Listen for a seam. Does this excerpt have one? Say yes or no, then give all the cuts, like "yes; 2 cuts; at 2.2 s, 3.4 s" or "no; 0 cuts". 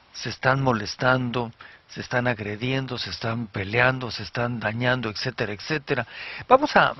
yes; 1 cut; at 2.6 s